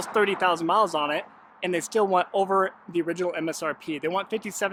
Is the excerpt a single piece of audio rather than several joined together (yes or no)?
yes